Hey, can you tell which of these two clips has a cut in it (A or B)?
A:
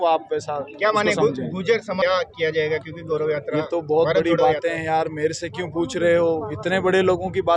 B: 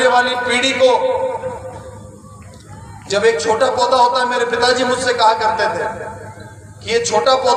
A